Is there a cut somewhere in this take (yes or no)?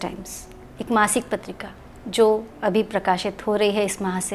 no